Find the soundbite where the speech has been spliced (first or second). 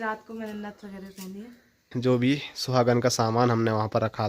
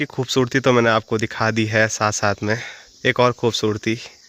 first